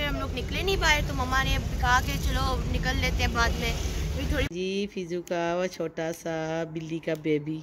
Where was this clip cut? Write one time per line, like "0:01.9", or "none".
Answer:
0:04.5